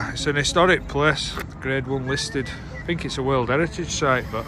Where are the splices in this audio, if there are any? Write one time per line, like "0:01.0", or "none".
0:01.3
0:02.7